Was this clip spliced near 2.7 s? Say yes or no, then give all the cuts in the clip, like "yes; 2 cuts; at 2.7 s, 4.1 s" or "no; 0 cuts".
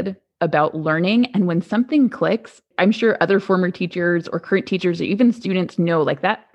yes; 1 cut; at 2.7 s